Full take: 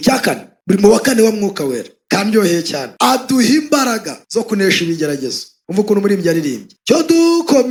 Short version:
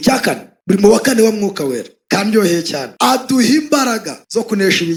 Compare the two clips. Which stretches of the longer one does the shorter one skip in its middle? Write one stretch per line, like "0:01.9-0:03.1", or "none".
none